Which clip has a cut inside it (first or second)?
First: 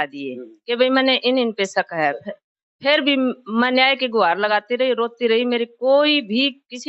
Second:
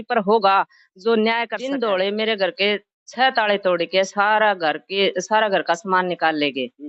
second